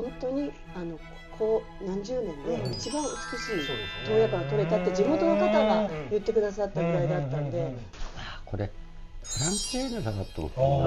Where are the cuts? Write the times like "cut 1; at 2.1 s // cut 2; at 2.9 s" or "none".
cut 1; at 7.9 s

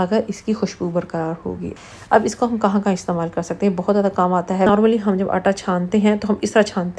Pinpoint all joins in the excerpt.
cut 1; at 1.7 s // cut 2; at 4.7 s

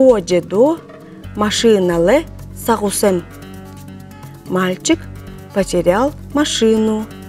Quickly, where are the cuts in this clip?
none

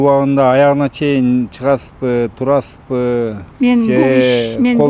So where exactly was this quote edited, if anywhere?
none

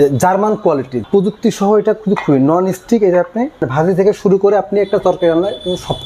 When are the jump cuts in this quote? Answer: cut 1; at 1.0 s // cut 2; at 3.6 s

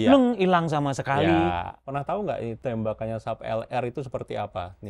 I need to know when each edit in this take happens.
cut 1; at 1.8 s // cut 2; at 2.6 s

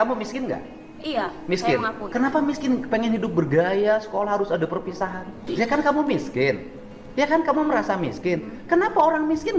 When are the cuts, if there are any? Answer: cut 1; at 5.4 s

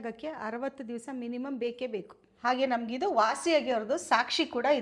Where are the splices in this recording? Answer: cut 1; at 2.3 s

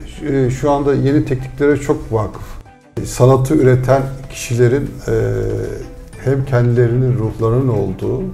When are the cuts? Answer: cut 1; at 2.8 s

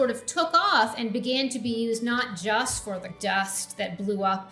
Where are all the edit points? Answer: cut 1; at 3.1 s

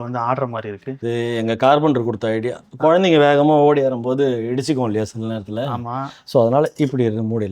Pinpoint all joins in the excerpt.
cut 1; at 1.0 s

